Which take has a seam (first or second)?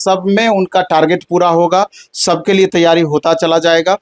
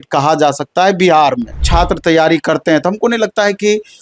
second